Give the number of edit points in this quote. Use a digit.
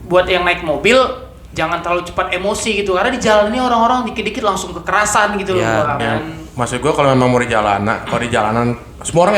1